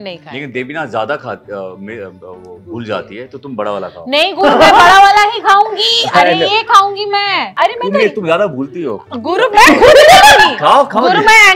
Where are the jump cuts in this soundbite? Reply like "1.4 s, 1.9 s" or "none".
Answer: 7.5 s